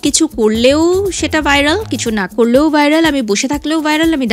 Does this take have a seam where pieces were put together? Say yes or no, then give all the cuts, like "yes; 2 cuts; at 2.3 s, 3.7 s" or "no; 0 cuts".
no; 0 cuts